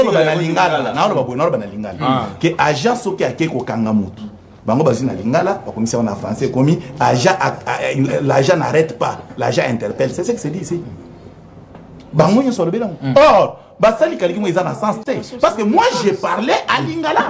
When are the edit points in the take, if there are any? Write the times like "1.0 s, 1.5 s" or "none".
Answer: none